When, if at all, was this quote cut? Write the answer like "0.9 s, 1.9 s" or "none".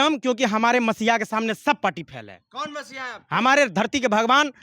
none

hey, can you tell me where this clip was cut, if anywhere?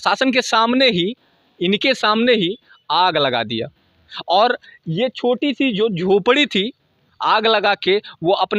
none

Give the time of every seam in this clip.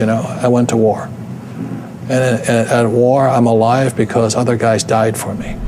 none

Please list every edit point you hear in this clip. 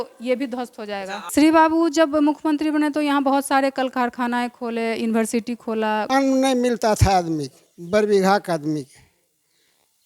1.2 s, 6.0 s

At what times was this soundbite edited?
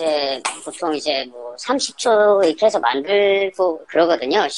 none

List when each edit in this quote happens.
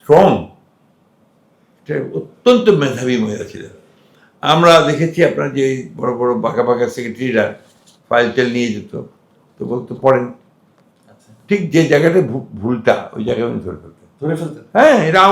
none

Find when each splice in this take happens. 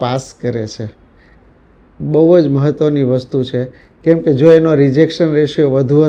none

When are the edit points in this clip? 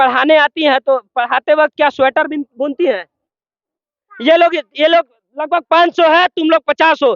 3.2 s

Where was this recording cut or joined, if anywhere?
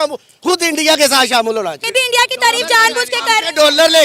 1.8 s

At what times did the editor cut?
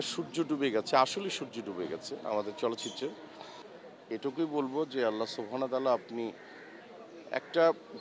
3.6 s

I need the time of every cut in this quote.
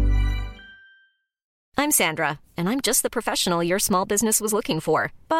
1.5 s

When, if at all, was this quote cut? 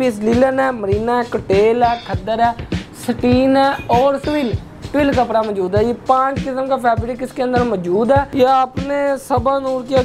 4.2 s, 8.3 s

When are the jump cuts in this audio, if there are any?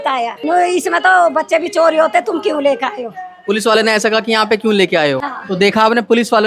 none

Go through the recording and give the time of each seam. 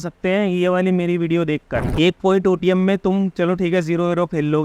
1.8 s

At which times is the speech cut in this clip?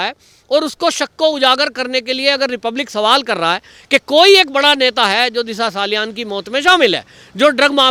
none

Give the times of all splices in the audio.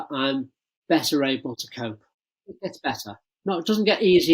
1.9 s

